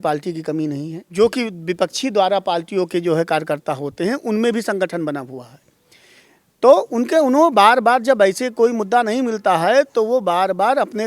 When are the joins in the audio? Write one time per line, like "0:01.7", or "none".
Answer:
0:01.0